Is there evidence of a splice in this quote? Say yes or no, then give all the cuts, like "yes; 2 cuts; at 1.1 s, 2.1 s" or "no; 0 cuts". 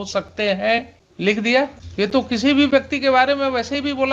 yes; 2 cuts; at 1.0 s, 1.8 s